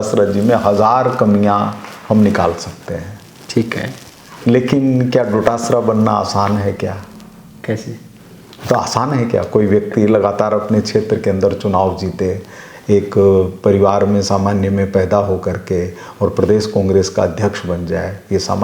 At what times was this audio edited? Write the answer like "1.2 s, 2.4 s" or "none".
none